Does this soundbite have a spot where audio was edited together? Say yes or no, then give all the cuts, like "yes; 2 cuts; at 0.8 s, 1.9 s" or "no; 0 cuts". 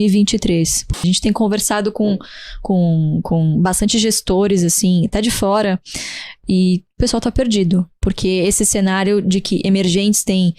yes; 1 cut; at 0.9 s